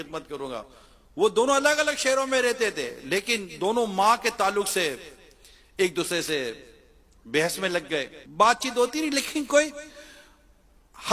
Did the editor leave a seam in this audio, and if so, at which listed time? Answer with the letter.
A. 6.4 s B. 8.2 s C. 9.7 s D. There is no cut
B